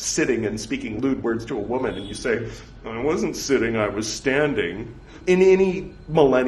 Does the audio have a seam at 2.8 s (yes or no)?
no